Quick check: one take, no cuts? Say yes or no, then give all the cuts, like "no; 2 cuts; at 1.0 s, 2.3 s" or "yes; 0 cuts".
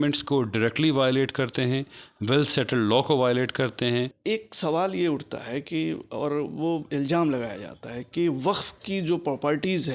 no; 1 cut; at 4.2 s